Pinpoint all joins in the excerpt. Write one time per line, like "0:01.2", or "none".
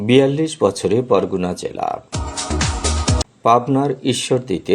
none